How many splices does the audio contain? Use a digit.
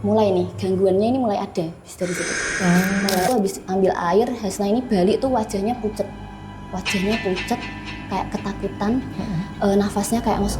1